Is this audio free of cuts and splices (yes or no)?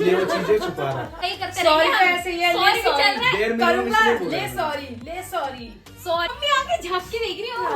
no